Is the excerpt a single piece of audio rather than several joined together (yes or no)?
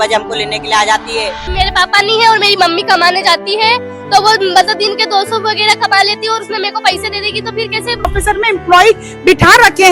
no